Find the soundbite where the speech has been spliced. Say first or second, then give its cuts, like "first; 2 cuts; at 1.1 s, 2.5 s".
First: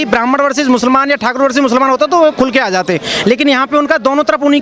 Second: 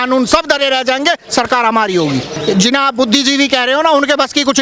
second; 1 cut; at 2.4 s